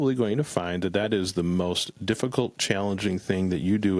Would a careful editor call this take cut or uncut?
uncut